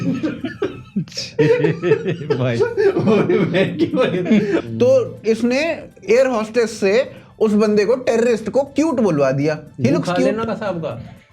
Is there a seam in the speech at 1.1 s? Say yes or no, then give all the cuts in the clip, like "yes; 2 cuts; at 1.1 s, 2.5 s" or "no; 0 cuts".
no; 1 cut; at 4.7 s